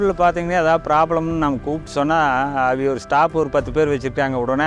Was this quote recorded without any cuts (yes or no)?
yes